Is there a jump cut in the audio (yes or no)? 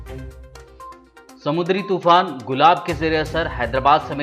yes